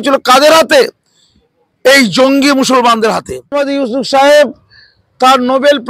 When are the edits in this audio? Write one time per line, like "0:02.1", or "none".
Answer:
0:03.5